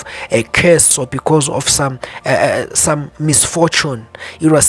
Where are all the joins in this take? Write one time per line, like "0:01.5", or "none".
0:01.0